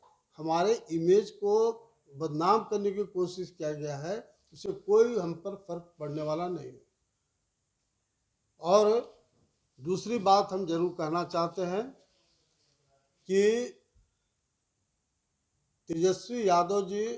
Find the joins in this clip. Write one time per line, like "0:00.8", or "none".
none